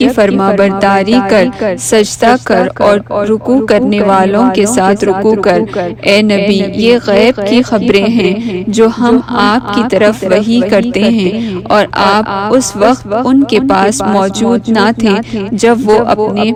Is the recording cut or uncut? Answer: uncut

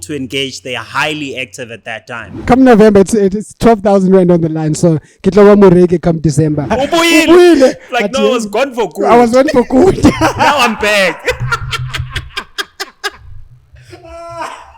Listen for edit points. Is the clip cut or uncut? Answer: cut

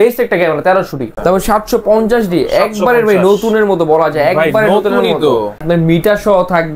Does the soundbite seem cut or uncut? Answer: cut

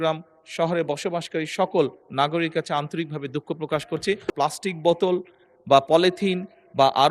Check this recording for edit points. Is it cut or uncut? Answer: cut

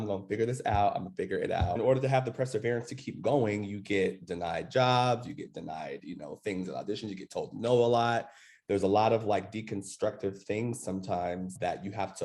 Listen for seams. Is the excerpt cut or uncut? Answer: cut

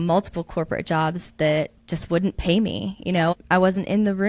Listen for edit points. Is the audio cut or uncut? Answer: cut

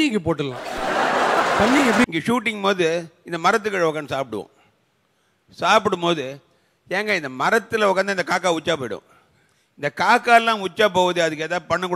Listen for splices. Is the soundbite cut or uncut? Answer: cut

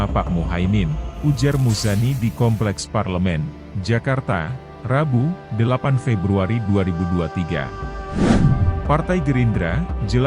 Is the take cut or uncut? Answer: cut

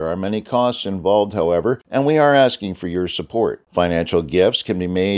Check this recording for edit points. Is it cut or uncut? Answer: cut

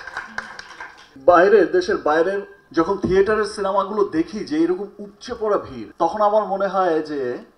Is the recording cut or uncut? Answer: cut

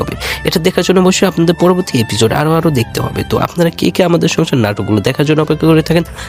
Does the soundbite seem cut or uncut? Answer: uncut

